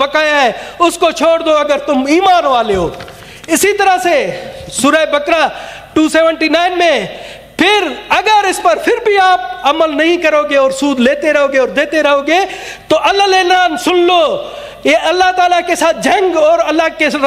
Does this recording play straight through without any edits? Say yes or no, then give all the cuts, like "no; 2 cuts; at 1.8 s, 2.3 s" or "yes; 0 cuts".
yes; 0 cuts